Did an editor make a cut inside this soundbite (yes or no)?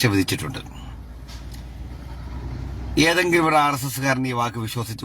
yes